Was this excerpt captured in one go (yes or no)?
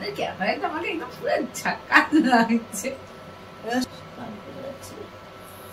no